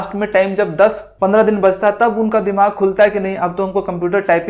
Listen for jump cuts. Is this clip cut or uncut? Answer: uncut